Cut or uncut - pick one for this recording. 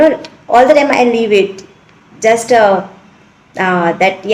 uncut